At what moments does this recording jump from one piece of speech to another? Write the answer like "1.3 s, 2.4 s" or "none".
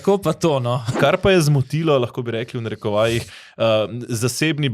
0.9 s